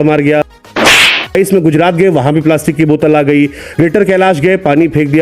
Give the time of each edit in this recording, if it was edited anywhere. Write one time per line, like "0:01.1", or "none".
0:01.3